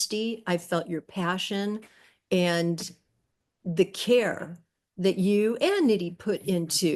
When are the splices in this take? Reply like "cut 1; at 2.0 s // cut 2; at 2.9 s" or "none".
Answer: none